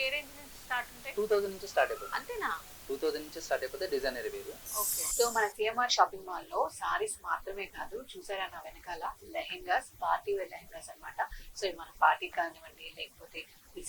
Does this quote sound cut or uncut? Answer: cut